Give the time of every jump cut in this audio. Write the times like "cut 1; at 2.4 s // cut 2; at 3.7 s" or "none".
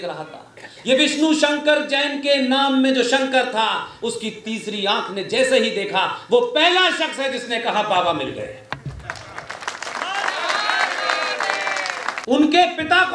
cut 1; at 12.2 s